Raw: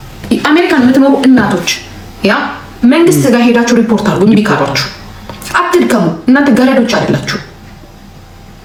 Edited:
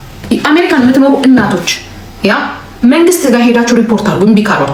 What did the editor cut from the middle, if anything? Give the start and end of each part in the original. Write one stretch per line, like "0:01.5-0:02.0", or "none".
none